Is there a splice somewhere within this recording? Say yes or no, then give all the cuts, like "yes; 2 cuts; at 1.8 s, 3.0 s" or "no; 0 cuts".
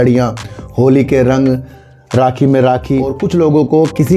yes; 1 cut; at 3.1 s